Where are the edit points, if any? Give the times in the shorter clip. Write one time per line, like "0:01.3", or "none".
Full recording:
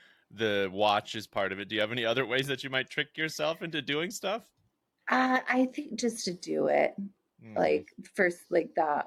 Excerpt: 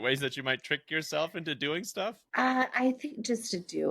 0:02.2